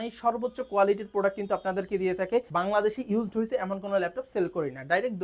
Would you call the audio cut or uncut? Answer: cut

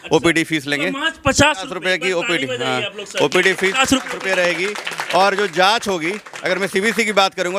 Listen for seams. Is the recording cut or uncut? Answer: uncut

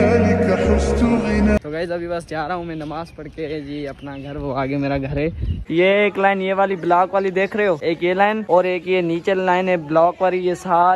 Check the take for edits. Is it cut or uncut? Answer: cut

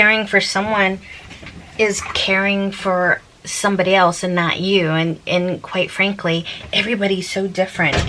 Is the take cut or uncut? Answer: uncut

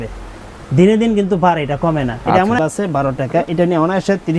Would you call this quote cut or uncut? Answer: cut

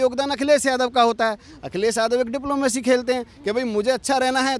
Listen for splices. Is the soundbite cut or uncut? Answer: uncut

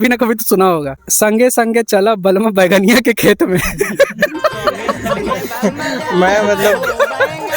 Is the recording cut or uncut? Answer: cut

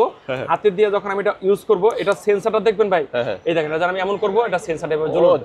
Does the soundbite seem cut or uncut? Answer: uncut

